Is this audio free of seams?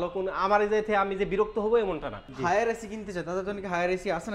no; 1 cut; at 2.2 s

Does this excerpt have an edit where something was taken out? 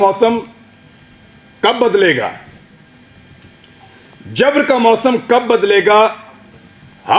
no; 0 cuts

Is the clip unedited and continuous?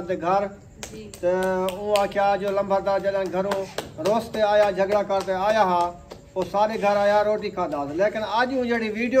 yes; 0 cuts

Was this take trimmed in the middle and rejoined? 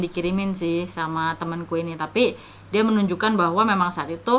no; 0 cuts

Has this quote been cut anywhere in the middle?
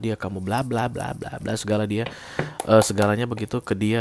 no; 0 cuts

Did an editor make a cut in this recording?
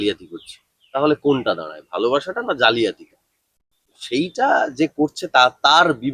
no; 0 cuts

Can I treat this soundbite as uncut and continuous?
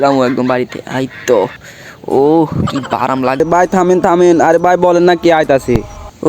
no; 1 cut; at 3.4 s

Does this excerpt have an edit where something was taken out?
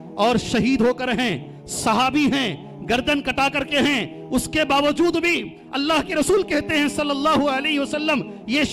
no; 0 cuts

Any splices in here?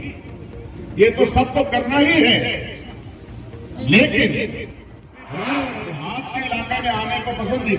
yes; 1 cut; at 6.1 s

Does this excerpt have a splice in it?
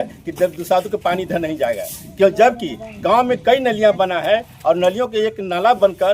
no; 0 cuts

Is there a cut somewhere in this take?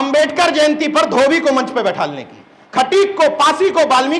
yes; 1 cut; at 2.5 s

